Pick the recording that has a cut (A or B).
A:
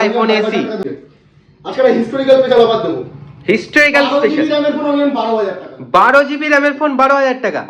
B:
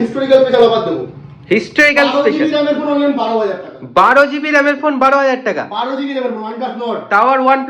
A